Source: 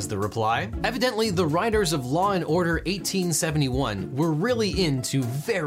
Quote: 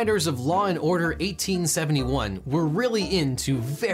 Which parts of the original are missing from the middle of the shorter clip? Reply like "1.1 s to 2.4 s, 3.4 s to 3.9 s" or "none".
none